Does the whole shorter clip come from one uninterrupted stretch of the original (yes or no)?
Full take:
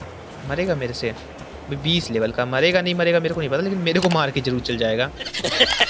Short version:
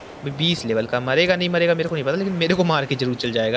yes